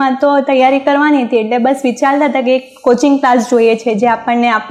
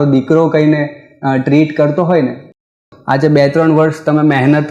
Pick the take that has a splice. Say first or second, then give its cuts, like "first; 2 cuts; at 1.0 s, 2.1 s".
second; 1 cut; at 2.7 s